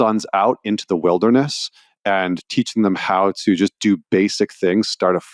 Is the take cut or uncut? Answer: uncut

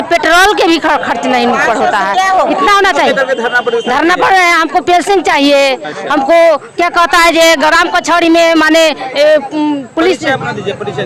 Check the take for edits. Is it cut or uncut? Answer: uncut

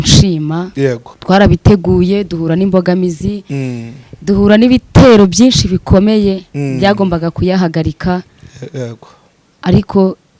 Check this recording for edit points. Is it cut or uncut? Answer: cut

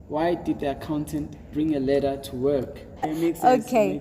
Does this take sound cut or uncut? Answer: cut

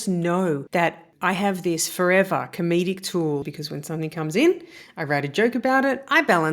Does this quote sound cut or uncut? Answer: cut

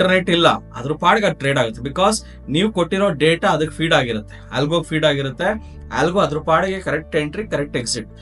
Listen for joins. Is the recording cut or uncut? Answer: uncut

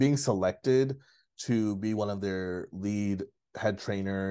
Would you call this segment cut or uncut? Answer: uncut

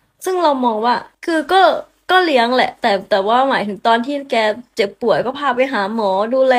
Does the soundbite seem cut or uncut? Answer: cut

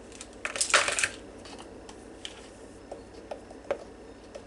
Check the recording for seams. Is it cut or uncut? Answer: uncut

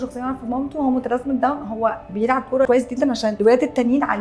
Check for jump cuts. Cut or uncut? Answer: cut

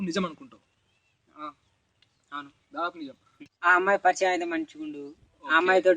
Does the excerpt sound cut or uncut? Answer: cut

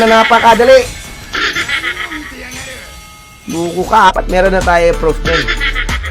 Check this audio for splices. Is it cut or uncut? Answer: cut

